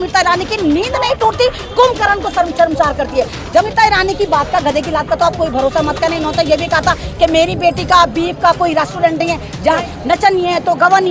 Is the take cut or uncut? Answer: cut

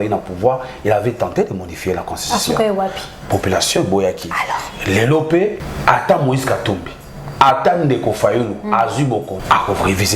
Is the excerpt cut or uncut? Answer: cut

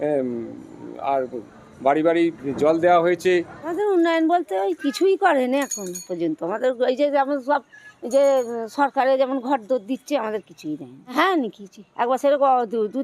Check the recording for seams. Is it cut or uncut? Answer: cut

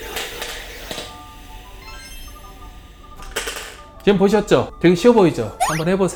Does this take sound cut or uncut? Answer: uncut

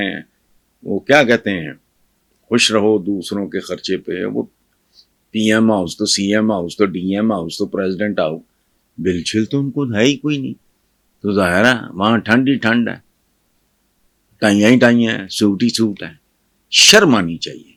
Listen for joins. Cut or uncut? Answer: uncut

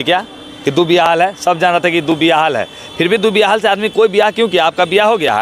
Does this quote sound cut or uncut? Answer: uncut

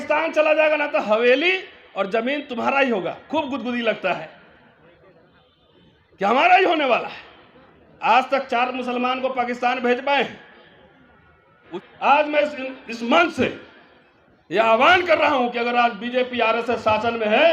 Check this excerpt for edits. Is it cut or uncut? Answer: cut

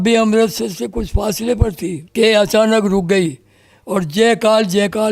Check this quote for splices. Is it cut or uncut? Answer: cut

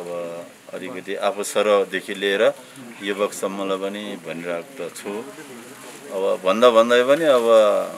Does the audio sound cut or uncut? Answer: uncut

